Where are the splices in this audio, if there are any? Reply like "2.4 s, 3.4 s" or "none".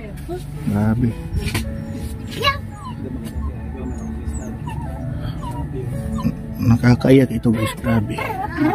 1.4 s

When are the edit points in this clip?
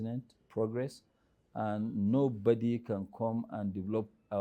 none

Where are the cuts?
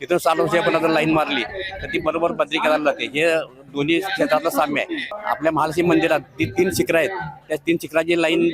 5.1 s

